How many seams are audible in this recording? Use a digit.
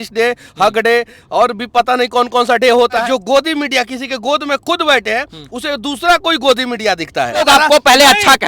2